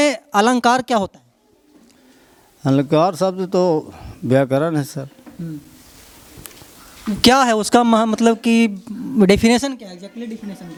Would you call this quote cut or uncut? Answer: uncut